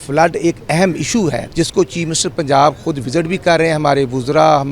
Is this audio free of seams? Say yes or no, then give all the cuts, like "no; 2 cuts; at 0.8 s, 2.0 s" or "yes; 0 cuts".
no; 1 cut; at 1.5 s